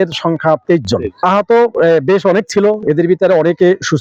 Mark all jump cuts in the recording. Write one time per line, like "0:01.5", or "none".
none